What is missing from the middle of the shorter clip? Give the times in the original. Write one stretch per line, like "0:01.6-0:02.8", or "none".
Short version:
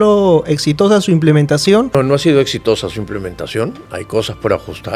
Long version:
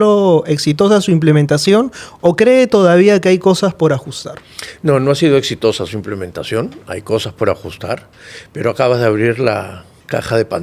0:01.9-0:04.9